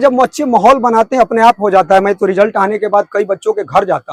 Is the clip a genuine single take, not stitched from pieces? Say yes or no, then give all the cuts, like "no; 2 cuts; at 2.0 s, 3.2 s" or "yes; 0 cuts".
yes; 0 cuts